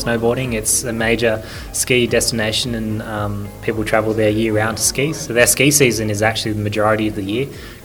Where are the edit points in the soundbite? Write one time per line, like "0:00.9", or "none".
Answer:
none